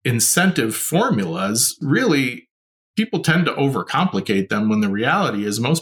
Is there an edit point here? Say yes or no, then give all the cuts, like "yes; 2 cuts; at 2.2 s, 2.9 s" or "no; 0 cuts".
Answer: no; 0 cuts